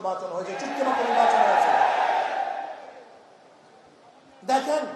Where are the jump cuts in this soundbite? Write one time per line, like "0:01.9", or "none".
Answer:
none